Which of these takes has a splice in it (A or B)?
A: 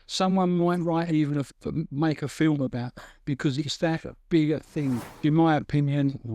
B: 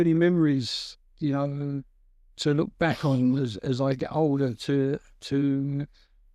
A